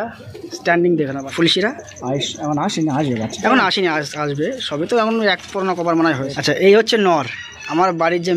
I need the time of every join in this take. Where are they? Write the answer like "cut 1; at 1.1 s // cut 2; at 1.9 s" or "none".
cut 1; at 1.2 s // cut 2; at 6.3 s